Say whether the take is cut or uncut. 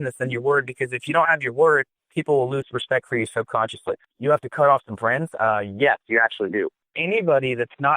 cut